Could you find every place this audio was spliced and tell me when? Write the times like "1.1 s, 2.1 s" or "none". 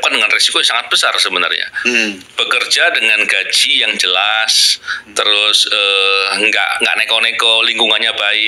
none